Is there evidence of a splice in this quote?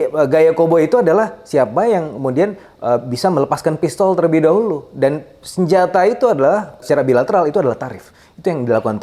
yes; 1 cut; at 6.8 s

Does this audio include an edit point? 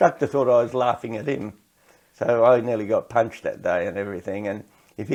no; 0 cuts

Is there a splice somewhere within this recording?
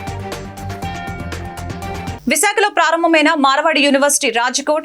yes; 1 cut; at 2.1 s

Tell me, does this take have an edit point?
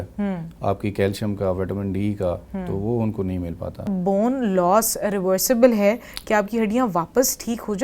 yes; 1 cut; at 3.9 s

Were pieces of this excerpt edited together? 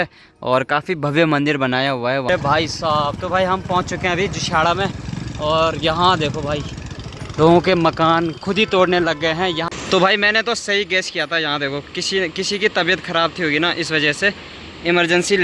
yes; 2 cuts; at 2.3 s, 9.6 s

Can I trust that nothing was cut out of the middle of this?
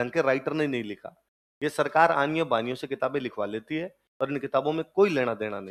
yes; 0 cuts

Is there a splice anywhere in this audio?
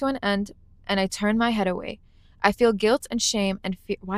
no; 0 cuts

